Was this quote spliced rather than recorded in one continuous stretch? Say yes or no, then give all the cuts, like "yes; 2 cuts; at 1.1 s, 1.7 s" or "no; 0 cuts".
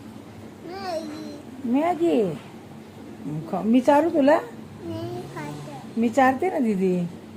no; 0 cuts